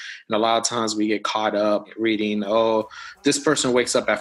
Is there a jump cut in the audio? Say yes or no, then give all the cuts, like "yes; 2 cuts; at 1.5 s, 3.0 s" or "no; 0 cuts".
yes; 1 cut; at 1.9 s